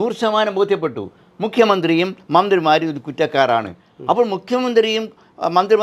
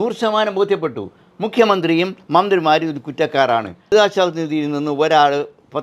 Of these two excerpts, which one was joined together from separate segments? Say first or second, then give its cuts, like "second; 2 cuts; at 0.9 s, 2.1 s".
second; 1 cut; at 3.9 s